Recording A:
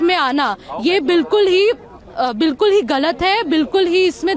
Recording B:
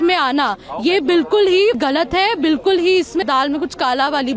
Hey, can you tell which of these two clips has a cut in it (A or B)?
B